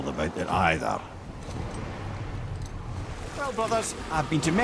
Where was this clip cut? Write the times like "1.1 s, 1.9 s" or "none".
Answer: 3.2 s